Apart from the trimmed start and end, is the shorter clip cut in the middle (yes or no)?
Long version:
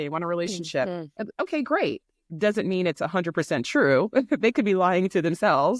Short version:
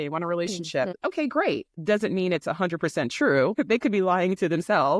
yes